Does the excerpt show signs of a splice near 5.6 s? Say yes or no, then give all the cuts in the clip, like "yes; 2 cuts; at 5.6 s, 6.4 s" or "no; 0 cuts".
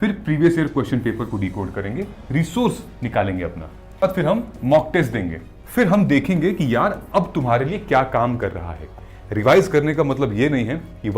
yes; 4 cuts; at 2.2 s, 4.0 s, 5.6 s, 8.8 s